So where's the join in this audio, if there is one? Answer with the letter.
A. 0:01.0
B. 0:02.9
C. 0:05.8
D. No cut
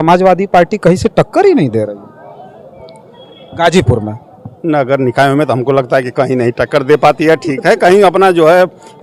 D